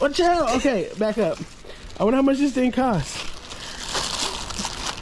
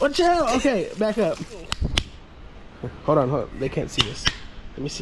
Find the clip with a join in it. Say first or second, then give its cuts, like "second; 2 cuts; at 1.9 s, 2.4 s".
second; 1 cut; at 1.8 s